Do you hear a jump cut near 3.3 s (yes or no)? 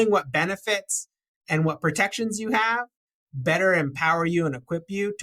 no